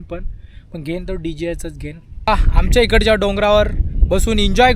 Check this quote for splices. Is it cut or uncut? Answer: cut